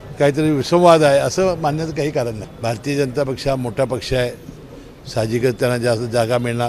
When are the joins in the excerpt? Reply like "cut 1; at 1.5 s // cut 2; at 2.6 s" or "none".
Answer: cut 1; at 2.5 s